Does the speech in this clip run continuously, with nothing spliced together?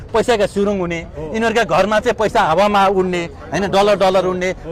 yes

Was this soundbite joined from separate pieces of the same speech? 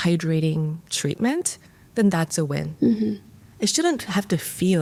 no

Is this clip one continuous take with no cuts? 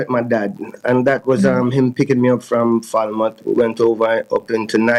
yes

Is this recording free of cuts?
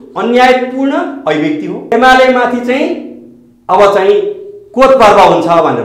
no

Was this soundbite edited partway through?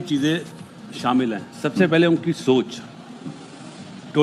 no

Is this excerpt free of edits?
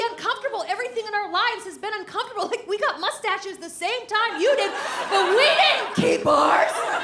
yes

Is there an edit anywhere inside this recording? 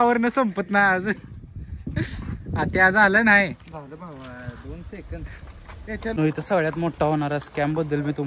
yes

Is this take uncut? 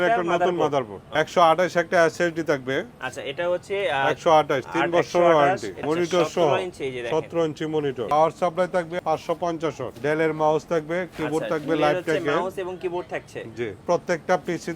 no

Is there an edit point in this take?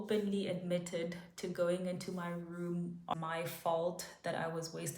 yes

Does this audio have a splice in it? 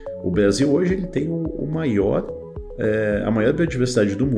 no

